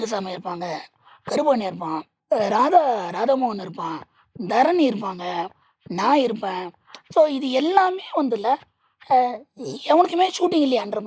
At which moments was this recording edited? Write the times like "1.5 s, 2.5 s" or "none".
2.1 s